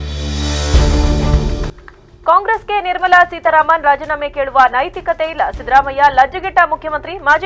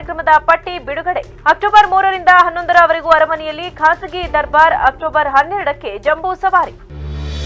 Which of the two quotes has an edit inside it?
first; 1 cut; at 1.8 s

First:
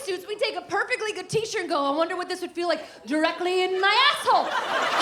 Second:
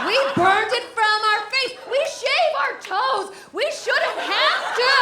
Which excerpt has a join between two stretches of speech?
second; 1 cut; at 1.9 s

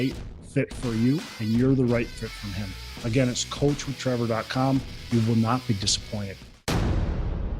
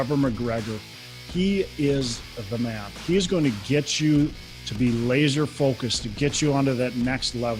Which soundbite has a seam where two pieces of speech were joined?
first; 1 cut; at 6.5 s

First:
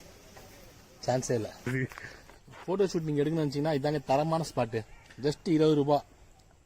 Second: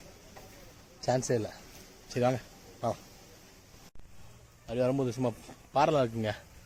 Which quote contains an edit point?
first; 1 cut; at 1.7 s

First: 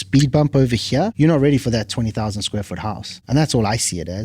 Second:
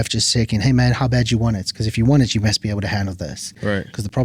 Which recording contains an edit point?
first; 2 cuts; at 1.1 s, 3.1 s

